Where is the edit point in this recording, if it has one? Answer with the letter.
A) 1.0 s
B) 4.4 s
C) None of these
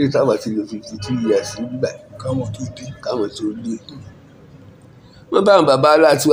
C